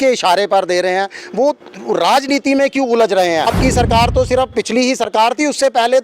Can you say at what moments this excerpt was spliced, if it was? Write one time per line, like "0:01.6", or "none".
0:03.5